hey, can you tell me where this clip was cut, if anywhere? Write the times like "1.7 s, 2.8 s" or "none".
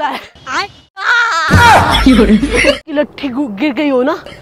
1.1 s, 2.9 s

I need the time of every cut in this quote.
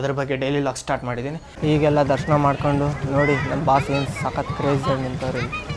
1.4 s

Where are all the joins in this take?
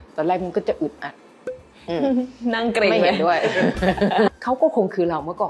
4.4 s

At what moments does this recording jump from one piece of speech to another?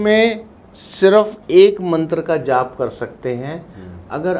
1.4 s

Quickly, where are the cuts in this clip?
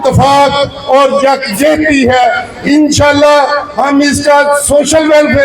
2.5 s

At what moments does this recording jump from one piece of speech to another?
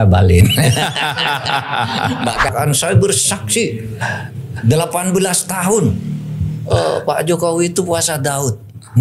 2.5 s

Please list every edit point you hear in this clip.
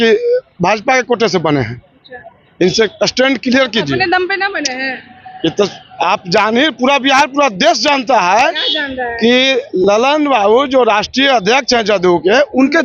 none

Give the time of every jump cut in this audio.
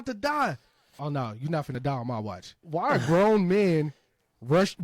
0.9 s, 2.6 s

